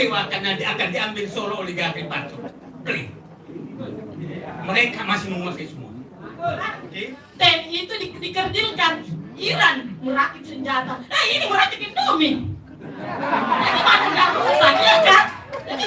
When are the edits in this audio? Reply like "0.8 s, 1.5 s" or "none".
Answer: 6.9 s